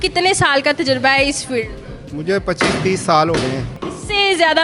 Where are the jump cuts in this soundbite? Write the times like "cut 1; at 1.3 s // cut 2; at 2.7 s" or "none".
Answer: cut 1; at 3.7 s